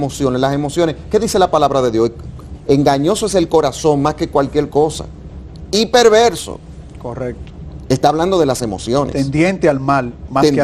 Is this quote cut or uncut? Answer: uncut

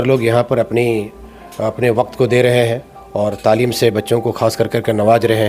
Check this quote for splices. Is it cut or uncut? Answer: uncut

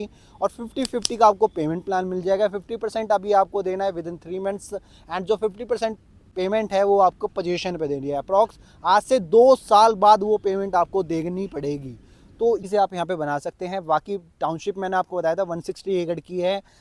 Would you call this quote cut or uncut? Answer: cut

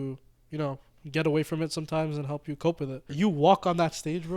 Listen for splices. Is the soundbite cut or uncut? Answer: cut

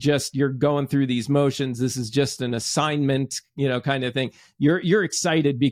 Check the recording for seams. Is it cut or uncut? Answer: uncut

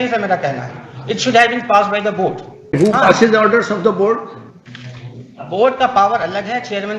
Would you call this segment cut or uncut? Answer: cut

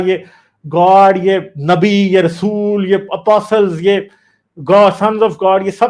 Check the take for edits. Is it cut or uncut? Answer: uncut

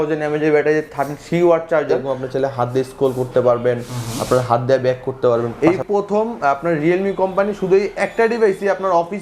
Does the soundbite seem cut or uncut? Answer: cut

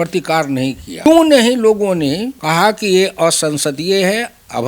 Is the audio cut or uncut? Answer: cut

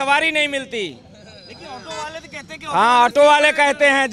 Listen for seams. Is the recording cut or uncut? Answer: uncut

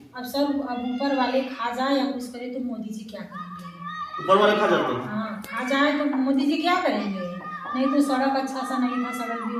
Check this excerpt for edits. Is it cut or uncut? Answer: uncut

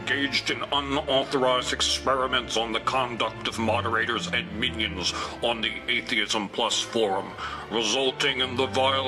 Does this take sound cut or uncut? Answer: cut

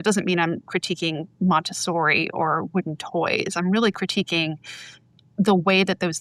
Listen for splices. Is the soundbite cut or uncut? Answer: uncut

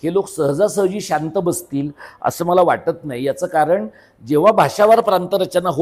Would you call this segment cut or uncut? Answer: uncut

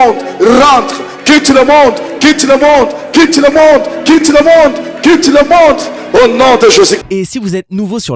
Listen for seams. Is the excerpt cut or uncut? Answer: cut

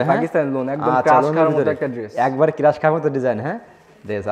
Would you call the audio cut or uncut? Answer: uncut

